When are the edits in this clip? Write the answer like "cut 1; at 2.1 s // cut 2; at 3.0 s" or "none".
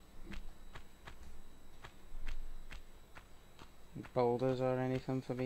cut 1; at 3.3 s